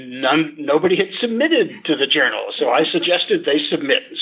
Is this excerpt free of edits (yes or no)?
yes